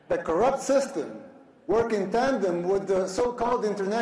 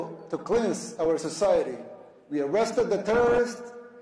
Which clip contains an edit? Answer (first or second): first